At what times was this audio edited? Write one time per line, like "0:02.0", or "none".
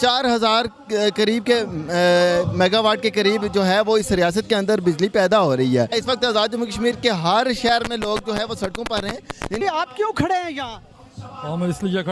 0:06.0
0:09.6